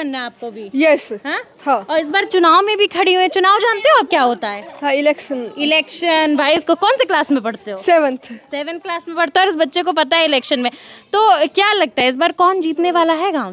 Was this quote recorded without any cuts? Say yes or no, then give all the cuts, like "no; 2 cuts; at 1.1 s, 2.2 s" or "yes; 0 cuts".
yes; 0 cuts